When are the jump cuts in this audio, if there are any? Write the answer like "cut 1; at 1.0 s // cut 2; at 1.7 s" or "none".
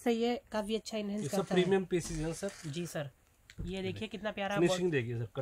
none